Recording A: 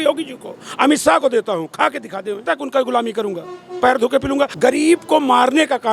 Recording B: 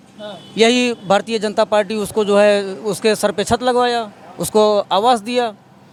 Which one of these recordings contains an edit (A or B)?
A